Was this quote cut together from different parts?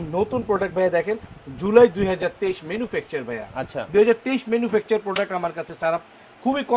no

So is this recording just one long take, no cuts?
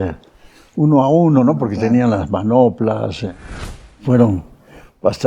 no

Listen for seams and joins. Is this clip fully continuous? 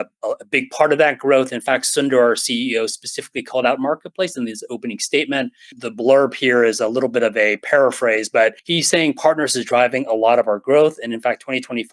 no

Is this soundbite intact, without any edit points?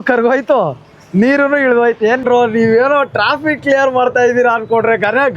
no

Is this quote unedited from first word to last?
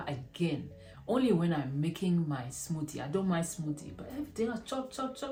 yes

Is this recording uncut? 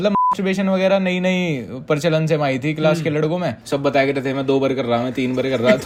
yes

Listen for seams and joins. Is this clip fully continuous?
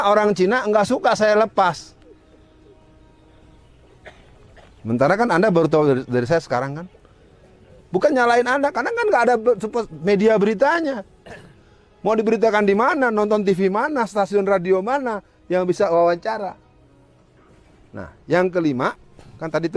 yes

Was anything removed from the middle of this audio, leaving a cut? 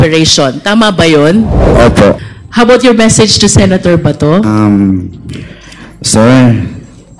yes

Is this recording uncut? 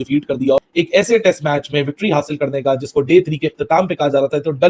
yes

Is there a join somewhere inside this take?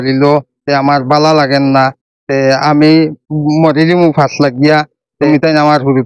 yes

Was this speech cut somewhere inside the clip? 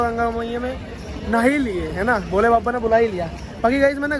no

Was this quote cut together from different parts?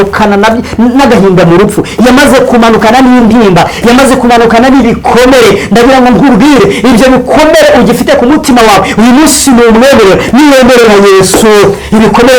no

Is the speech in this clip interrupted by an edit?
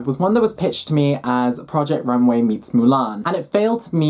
no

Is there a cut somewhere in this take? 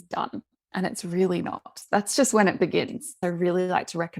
yes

